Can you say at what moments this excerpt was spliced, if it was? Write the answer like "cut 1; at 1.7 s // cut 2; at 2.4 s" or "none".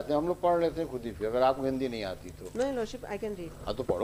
none